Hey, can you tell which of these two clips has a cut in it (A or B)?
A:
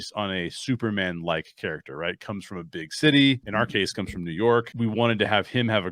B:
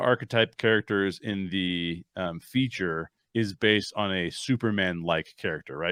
A